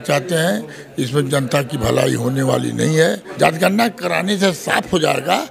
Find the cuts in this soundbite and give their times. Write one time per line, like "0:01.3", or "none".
0:03.3